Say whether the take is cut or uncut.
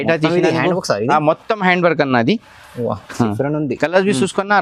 uncut